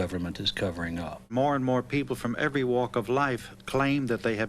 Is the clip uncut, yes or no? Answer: no